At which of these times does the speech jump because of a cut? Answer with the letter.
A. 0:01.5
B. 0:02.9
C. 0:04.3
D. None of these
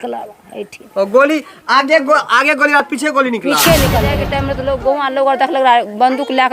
C